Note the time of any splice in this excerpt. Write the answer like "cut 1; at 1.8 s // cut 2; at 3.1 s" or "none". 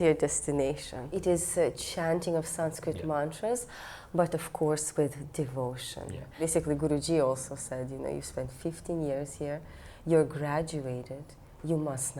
cut 1; at 1.2 s // cut 2; at 6.4 s

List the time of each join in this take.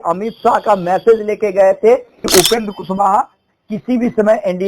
cut 1; at 2.1 s

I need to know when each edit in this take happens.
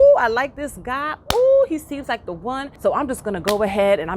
cut 1; at 2.7 s

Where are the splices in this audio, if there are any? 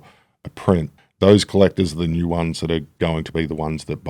cut 1; at 1.0 s // cut 2; at 2.9 s

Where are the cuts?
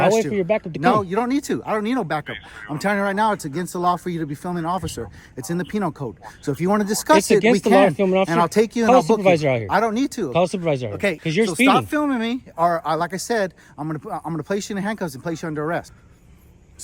cut 1; at 11.2 s // cut 2; at 15.9 s

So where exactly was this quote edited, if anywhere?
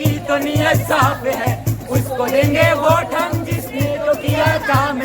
none

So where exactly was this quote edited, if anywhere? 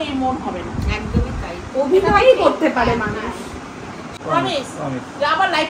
cut 1; at 4.1 s

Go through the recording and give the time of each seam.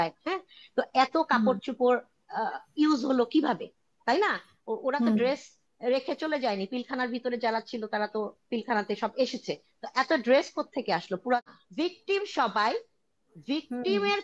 cut 1; at 11.4 s

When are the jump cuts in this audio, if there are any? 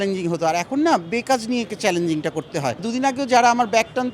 cut 1; at 2.8 s

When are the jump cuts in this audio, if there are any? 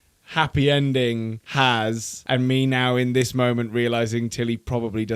cut 1; at 1.4 s // cut 2; at 2.1 s

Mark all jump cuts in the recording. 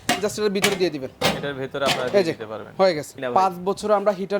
cut 1; at 3.1 s

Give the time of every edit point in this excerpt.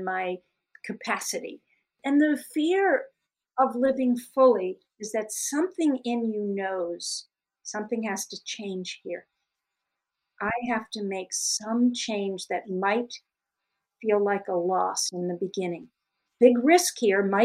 cut 1; at 2.0 s // cut 2; at 16.2 s

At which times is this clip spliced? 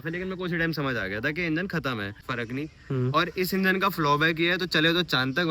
cut 1; at 2.2 s

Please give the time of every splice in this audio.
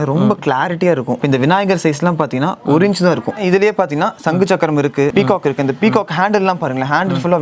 cut 1; at 1.2 s // cut 2; at 3.4 s // cut 3; at 5.1 s

